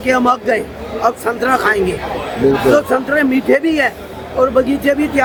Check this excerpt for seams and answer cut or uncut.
uncut